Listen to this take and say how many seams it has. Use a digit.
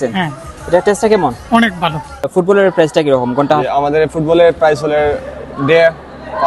1